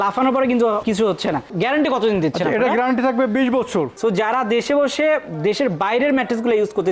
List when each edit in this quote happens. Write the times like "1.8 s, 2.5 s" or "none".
3.9 s

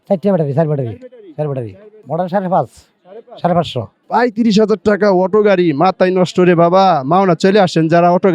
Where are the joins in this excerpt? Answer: 3.9 s

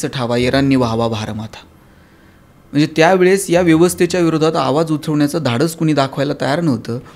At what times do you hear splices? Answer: none

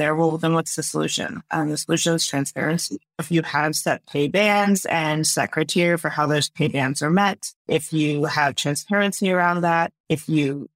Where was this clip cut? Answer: 7.6 s

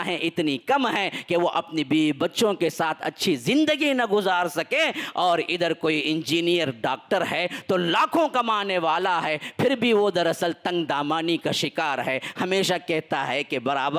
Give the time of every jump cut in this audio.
none

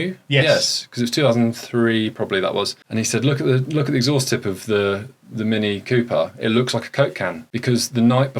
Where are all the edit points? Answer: 2.8 s, 7.5 s

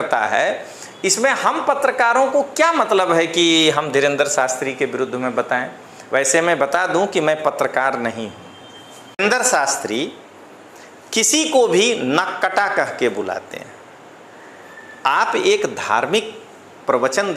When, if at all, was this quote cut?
9.2 s

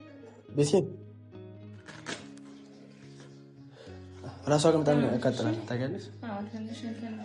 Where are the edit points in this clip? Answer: 1.0 s, 4.2 s

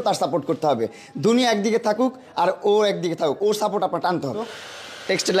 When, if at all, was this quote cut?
4.5 s

